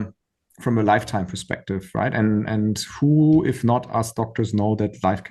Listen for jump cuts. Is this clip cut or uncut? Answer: uncut